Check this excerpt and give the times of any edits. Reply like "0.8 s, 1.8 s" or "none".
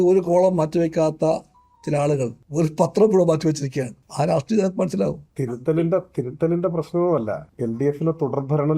2.4 s, 4.0 s, 5.3 s, 7.5 s